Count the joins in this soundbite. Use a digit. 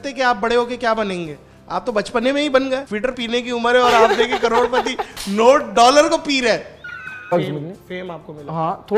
2